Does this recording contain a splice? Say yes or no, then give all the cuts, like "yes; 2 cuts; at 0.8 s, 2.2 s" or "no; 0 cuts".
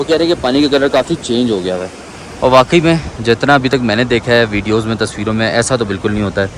no; 0 cuts